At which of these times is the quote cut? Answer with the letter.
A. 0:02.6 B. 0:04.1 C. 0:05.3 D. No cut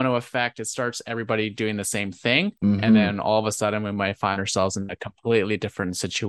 D